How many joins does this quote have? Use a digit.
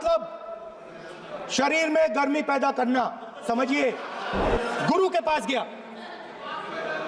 1